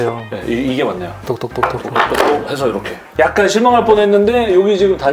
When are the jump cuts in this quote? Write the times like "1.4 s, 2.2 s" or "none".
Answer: none